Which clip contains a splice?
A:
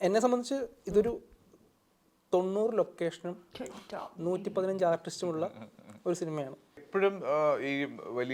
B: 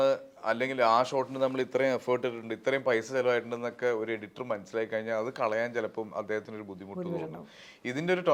A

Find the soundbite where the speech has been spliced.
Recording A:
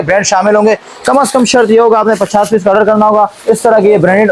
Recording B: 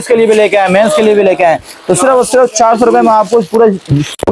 A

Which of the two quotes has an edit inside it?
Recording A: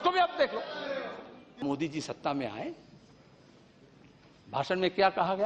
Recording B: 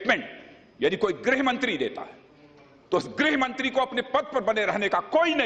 A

